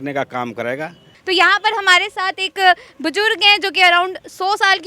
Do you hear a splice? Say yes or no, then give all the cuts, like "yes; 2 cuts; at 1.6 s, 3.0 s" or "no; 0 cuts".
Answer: yes; 1 cut; at 1.1 s